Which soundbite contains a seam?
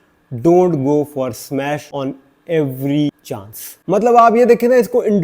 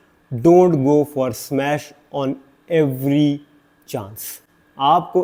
first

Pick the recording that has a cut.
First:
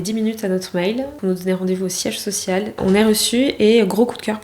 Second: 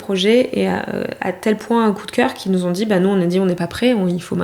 first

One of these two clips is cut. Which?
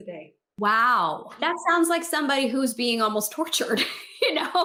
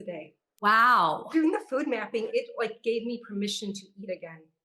second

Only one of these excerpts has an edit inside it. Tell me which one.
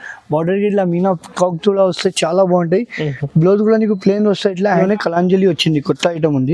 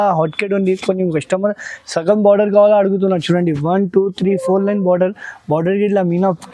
first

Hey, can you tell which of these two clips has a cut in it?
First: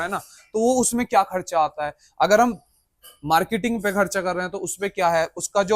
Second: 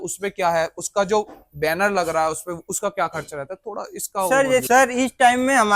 second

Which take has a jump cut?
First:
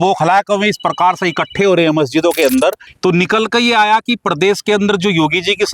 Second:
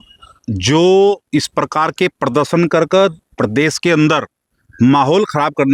first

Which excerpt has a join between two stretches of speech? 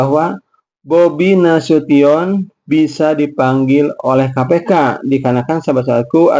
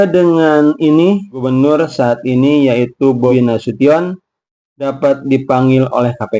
second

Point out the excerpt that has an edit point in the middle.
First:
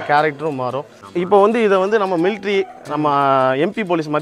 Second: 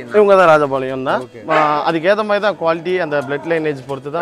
first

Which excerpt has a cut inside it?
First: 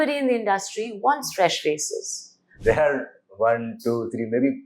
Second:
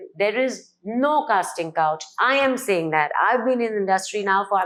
first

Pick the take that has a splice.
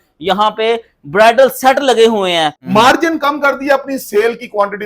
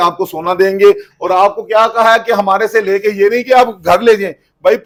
first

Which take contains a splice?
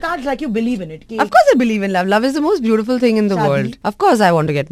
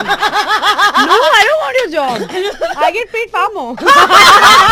first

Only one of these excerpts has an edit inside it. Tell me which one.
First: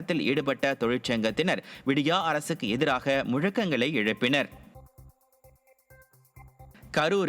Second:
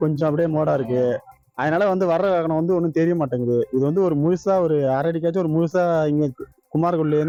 first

